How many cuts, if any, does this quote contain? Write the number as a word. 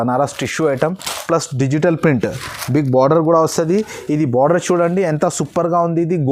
zero